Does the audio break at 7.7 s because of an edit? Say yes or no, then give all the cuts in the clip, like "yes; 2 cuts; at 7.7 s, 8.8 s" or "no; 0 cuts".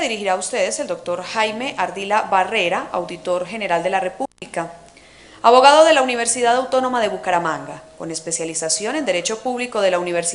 yes; 1 cut; at 7.7 s